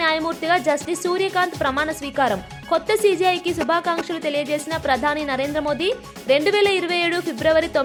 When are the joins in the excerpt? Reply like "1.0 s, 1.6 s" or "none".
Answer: none